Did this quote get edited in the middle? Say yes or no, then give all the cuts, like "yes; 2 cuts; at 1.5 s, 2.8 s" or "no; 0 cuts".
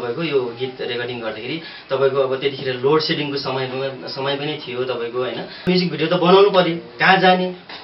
yes; 1 cut; at 5.7 s